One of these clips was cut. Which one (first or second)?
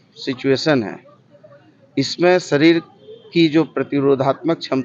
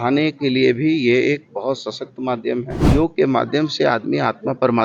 second